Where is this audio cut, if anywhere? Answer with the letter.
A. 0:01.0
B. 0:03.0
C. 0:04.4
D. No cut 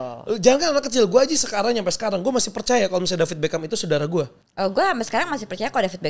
C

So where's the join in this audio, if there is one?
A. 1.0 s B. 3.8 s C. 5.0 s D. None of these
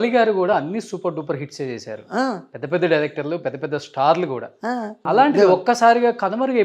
C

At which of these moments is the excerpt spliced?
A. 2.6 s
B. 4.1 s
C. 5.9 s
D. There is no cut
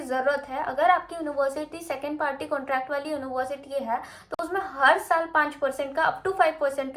D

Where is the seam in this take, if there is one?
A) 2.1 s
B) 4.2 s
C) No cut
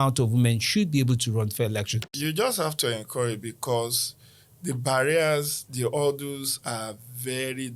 A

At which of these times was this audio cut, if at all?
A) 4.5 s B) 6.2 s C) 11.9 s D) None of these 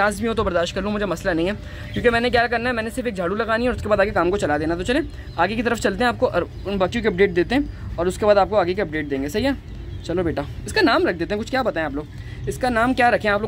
D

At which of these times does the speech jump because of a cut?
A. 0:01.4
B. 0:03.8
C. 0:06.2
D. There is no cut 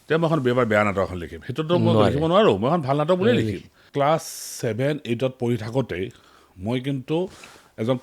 B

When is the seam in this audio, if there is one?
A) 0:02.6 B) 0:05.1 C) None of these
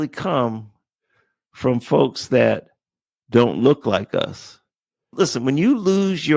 B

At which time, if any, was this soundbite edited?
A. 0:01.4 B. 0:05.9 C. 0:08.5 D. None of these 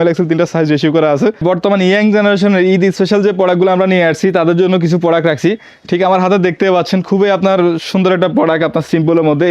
A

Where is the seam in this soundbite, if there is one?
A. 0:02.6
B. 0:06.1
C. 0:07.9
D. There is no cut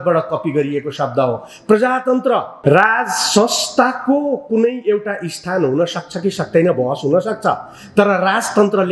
A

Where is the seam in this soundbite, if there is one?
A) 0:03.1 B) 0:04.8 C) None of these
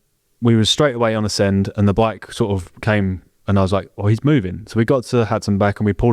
C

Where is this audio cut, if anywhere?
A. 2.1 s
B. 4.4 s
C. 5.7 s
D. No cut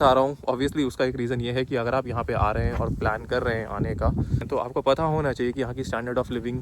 B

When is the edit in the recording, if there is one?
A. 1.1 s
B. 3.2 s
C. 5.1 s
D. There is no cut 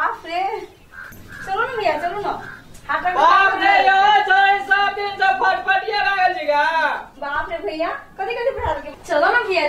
A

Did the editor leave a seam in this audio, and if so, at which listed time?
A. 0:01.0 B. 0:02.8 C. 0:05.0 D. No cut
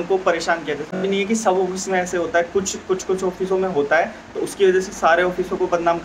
A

